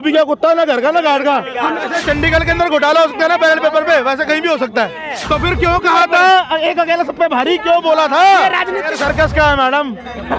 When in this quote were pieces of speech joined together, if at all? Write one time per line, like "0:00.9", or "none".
0:01.9
0:05.1
0:08.9